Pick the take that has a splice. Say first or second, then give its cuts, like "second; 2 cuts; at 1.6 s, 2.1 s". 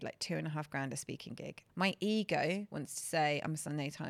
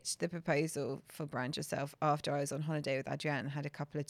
first; 2 cuts; at 1.6 s, 2.8 s